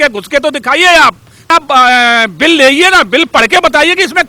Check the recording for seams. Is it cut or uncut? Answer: cut